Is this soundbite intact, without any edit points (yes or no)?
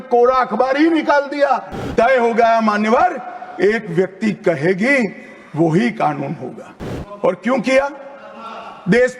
no